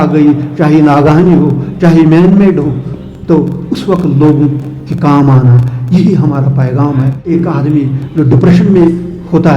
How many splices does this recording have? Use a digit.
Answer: 1